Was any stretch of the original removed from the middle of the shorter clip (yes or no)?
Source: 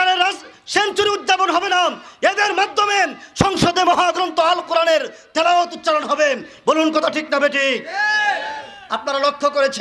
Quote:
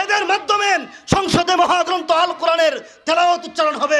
no